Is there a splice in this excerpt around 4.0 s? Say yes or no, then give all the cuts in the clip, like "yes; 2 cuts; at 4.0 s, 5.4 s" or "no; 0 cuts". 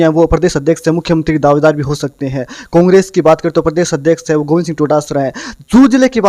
no; 0 cuts